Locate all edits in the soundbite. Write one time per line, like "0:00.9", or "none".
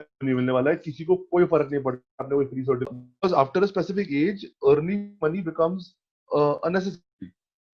0:02.9